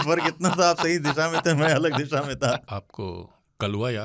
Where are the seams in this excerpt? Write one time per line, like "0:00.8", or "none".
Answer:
0:02.8